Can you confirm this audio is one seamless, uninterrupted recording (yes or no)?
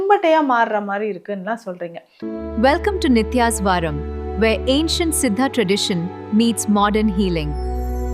no